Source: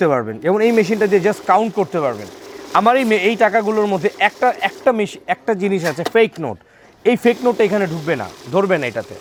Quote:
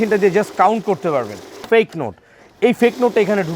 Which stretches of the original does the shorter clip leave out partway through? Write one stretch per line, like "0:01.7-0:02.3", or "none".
0:02.5-0:06.0